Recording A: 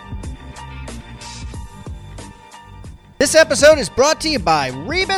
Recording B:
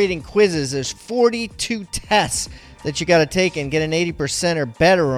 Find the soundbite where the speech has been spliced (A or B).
A